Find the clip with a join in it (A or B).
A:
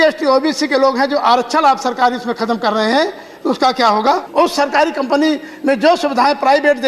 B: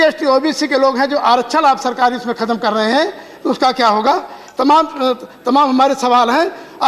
A